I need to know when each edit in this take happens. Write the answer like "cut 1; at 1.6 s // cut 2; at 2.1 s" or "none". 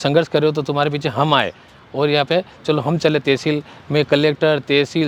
none